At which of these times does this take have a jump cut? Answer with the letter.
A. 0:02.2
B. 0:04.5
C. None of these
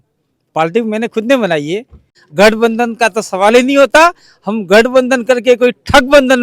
A